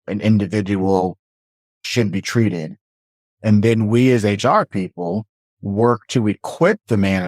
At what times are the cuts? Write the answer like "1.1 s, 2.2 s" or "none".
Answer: none